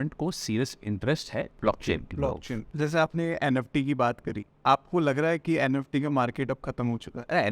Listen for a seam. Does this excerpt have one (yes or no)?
yes